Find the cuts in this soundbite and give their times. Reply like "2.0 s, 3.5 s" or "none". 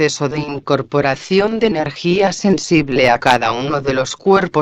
none